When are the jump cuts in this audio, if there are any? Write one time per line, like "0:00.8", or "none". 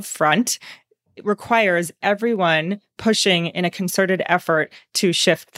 none

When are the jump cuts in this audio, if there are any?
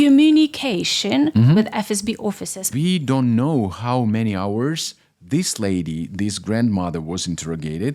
0:02.8

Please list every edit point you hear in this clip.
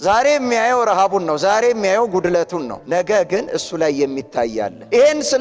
0:02.8

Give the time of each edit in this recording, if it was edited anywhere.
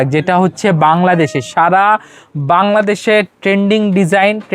none

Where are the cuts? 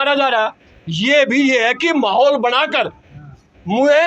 none

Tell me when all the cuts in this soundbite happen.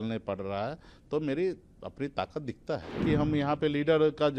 0:03.0

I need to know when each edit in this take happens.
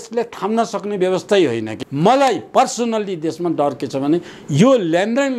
0:01.8

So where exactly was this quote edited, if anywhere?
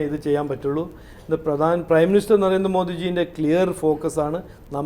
none

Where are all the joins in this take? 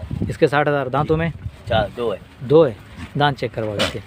none

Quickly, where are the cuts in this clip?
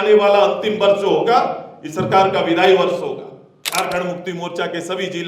0:03.5

